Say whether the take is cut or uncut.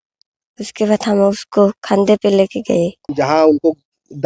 cut